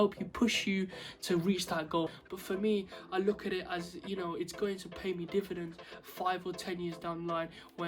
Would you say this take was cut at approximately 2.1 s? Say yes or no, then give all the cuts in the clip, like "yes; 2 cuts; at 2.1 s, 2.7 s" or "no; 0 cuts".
yes; 1 cut; at 2.1 s